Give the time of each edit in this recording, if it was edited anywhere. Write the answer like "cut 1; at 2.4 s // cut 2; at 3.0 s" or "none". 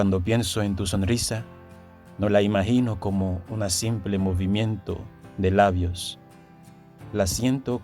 none